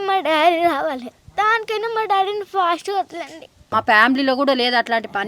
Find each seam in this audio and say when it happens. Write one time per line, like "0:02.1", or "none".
0:03.6